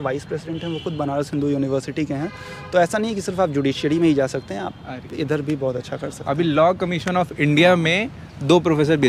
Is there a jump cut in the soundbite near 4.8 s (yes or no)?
no